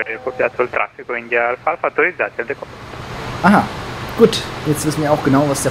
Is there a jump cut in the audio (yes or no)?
yes